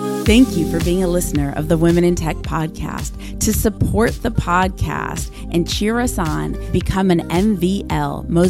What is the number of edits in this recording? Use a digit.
0